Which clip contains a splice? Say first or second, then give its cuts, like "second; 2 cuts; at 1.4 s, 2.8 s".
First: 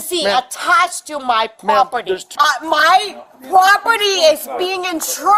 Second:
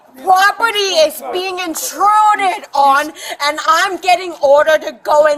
first; 1 cut; at 2.3 s